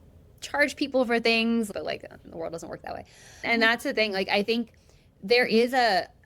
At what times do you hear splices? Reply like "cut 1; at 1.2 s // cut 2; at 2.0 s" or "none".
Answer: cut 1; at 1.7 s // cut 2; at 3.5 s

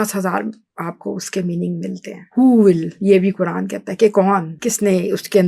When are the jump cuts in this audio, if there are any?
cut 1; at 2.2 s // cut 2; at 4.5 s

